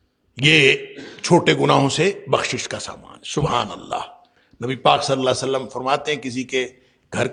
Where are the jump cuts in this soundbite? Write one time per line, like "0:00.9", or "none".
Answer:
none

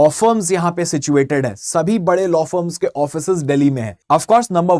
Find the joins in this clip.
0:03.9

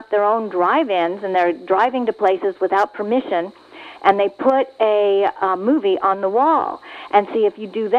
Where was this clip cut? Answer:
none

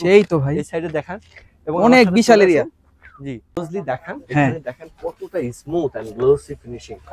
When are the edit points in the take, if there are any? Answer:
0:03.7

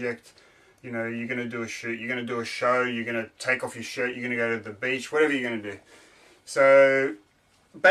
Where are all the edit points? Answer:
0:04.8

